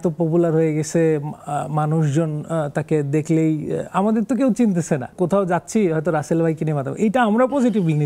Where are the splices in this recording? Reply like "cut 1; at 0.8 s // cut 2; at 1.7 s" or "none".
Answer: cut 1; at 5.1 s